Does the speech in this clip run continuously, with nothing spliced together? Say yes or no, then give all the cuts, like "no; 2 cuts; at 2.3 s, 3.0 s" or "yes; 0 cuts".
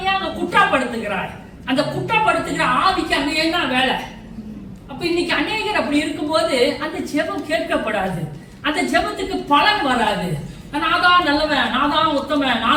yes; 0 cuts